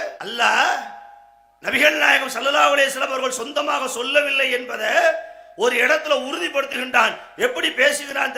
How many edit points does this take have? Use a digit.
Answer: 0